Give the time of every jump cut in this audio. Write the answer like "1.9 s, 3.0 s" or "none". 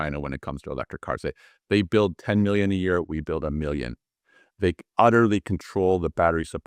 none